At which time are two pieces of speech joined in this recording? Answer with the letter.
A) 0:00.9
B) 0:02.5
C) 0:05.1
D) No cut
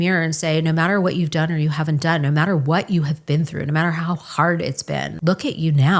C